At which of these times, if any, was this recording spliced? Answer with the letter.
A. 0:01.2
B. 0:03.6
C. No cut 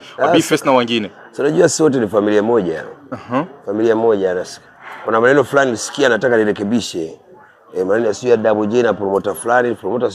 C